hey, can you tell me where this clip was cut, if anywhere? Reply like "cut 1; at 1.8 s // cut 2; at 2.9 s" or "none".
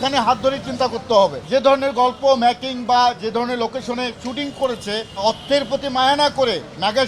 cut 1; at 1.4 s // cut 2; at 5.1 s